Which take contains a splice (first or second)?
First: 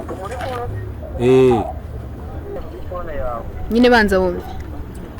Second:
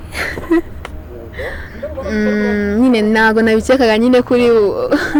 first